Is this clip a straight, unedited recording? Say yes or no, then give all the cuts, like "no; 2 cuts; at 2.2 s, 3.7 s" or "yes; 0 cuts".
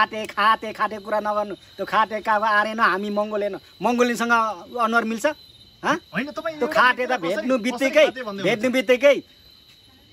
yes; 0 cuts